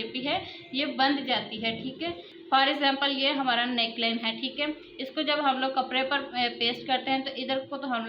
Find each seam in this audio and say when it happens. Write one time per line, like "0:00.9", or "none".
0:02.3